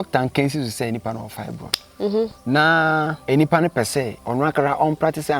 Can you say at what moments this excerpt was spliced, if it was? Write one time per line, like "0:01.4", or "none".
0:02.4
0:03.2
0:04.2